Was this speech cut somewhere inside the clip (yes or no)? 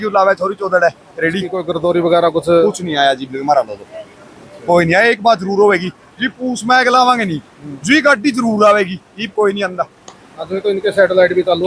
yes